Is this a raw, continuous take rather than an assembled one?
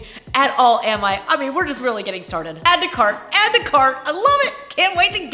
no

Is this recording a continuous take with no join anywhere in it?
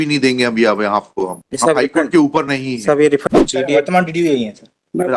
no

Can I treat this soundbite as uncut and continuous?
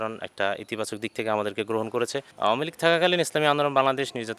no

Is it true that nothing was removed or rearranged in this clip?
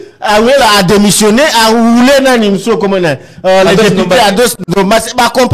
yes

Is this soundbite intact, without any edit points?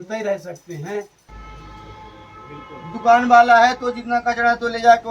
no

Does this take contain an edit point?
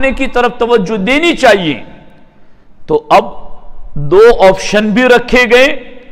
no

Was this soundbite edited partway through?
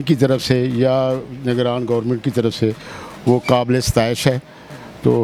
no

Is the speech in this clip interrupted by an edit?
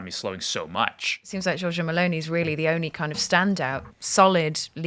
yes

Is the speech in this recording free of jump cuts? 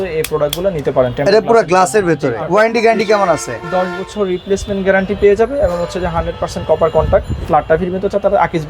no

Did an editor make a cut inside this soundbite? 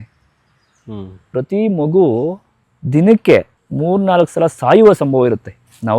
yes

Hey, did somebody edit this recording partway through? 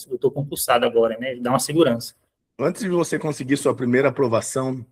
no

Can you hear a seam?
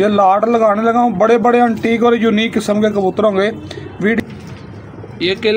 yes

